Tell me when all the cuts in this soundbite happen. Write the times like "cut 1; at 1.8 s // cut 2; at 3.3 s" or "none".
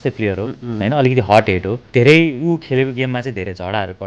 cut 1; at 1.8 s